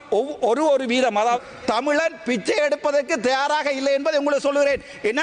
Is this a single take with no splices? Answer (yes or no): no